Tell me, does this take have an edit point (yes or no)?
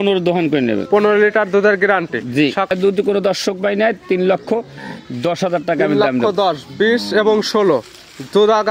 yes